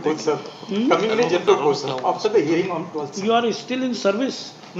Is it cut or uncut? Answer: uncut